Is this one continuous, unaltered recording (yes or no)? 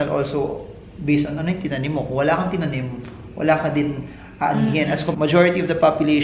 no